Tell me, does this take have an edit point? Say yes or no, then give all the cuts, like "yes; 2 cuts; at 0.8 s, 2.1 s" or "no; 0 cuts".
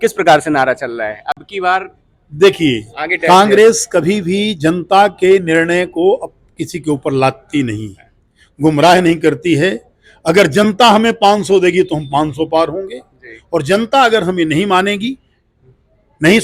no; 0 cuts